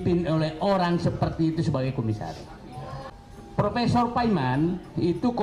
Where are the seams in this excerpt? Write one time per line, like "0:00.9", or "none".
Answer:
0:03.1